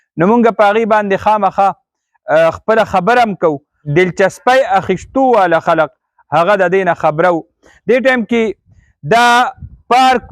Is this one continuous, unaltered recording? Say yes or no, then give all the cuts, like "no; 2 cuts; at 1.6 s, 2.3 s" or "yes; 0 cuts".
no; 1 cut; at 3.7 s